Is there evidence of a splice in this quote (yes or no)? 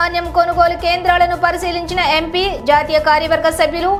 no